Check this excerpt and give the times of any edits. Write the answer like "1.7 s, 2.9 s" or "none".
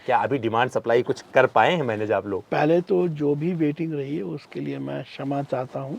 none